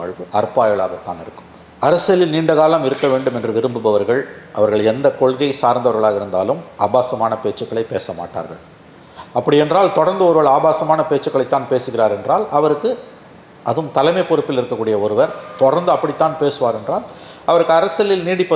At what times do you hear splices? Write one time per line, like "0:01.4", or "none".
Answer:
none